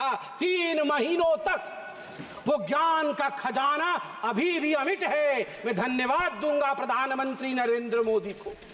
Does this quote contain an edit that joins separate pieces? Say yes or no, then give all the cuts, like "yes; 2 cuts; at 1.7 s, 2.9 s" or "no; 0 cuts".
no; 0 cuts